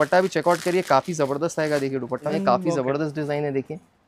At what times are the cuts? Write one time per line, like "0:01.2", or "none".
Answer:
0:02.3